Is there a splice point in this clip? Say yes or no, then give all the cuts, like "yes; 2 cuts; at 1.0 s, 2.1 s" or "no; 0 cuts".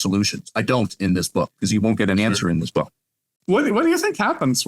yes; 1 cut; at 3.2 s